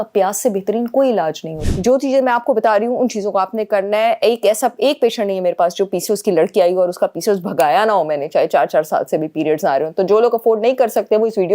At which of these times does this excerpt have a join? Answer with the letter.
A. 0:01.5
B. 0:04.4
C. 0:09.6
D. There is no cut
A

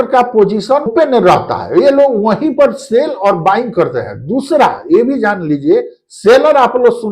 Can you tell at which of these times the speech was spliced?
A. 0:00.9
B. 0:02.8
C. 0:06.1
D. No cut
A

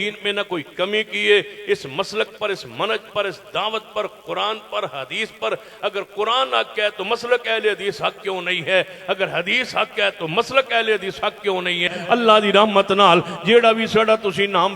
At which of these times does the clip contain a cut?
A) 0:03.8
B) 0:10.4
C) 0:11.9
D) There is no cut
C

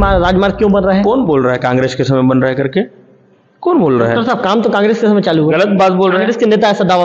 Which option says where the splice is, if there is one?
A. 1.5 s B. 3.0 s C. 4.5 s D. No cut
D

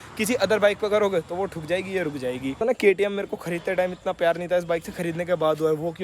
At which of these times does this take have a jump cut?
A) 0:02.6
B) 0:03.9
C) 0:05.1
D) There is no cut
A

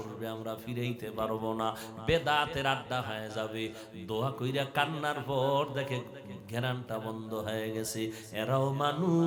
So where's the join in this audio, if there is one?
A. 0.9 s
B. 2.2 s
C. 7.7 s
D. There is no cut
D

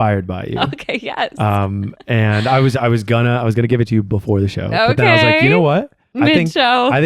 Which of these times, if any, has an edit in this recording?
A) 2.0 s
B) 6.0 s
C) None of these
B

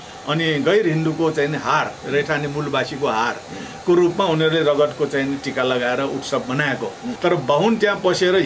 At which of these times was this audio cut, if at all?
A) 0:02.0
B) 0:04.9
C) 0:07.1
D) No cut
C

